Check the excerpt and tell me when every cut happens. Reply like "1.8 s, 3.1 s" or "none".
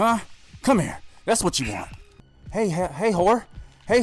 2.2 s